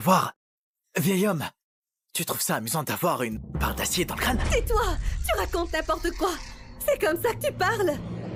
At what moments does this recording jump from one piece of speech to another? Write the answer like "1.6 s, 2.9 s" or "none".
none